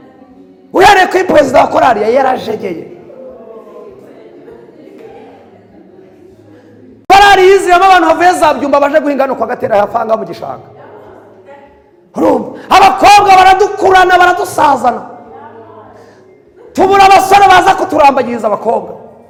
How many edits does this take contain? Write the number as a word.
zero